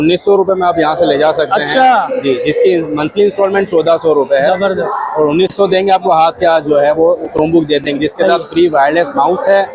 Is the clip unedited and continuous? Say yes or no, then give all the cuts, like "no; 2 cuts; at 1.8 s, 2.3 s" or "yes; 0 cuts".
yes; 0 cuts